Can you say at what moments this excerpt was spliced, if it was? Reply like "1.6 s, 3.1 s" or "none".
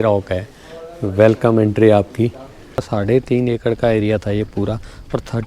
2.9 s